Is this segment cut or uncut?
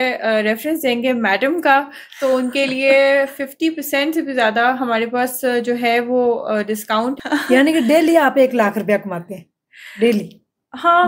cut